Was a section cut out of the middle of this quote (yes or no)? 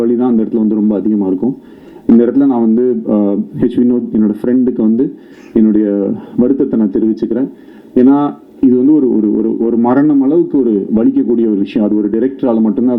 no